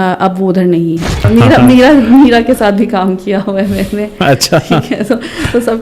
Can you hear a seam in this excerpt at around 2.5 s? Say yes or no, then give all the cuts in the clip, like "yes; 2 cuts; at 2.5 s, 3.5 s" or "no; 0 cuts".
no; 1 cut; at 1.2 s